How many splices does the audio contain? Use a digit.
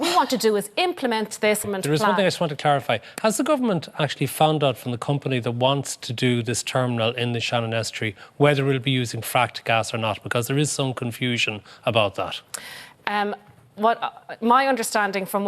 1